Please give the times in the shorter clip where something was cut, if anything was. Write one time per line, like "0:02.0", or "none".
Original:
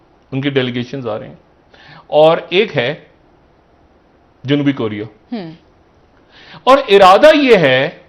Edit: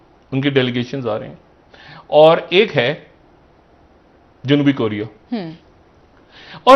none